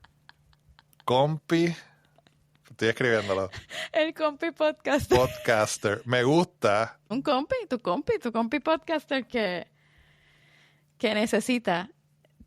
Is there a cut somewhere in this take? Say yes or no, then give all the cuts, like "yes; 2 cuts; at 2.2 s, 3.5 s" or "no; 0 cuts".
yes; 1 cut; at 7.0 s